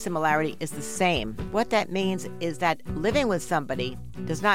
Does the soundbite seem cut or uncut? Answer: cut